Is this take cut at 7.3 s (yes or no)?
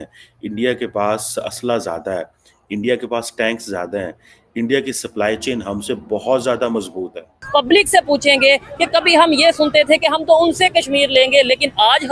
yes